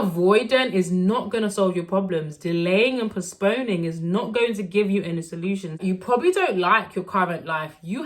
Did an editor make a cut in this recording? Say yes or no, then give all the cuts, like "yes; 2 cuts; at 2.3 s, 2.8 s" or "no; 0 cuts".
yes; 1 cut; at 5.7 s